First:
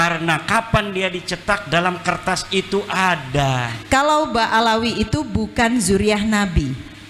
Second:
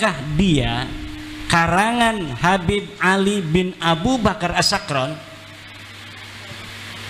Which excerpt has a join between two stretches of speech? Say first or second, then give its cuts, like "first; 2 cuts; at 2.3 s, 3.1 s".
first; 1 cut; at 3.7 s